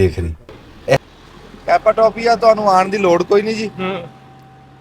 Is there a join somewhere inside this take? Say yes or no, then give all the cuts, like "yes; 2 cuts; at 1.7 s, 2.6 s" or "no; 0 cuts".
yes; 1 cut; at 1.0 s